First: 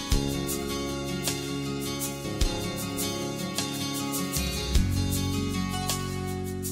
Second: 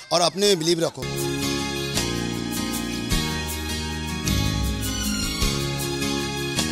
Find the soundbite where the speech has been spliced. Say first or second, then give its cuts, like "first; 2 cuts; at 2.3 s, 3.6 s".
second; 1 cut; at 1.0 s